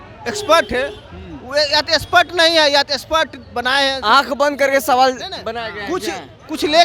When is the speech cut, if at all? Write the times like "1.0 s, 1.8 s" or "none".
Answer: none